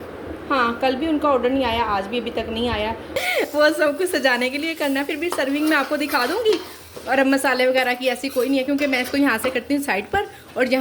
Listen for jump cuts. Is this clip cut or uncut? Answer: cut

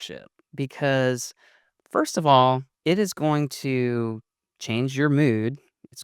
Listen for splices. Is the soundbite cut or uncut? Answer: cut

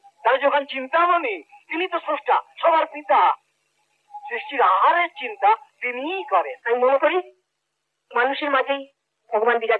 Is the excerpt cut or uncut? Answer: cut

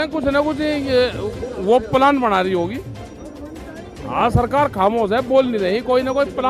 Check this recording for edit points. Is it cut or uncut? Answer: uncut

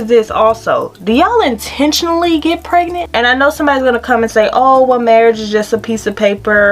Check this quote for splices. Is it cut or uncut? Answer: cut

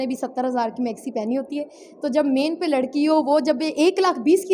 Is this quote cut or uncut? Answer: uncut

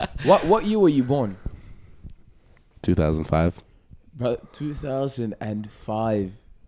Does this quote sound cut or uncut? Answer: uncut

